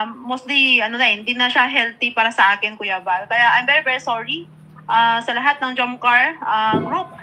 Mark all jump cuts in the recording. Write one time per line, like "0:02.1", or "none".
none

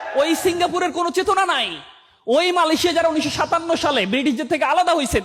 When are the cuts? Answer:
none

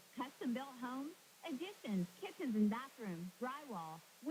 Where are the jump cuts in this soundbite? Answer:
none

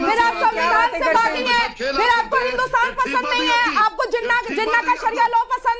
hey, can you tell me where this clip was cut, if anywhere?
none

